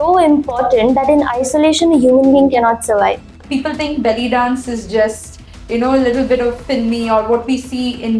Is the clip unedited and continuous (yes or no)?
no